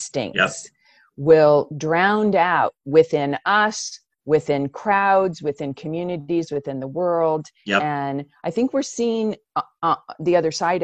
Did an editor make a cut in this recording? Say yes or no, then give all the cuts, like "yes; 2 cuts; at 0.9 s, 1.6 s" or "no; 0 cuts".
no; 0 cuts